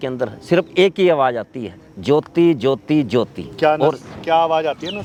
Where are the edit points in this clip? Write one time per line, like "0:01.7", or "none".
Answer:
none